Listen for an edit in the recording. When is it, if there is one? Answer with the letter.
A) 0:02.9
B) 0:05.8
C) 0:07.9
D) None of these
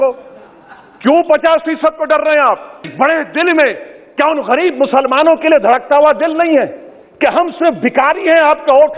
A